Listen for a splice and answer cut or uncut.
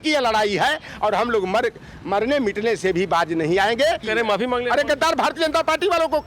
cut